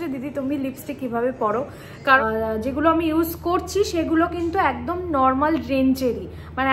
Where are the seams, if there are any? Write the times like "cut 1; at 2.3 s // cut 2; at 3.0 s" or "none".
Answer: cut 1; at 2.2 s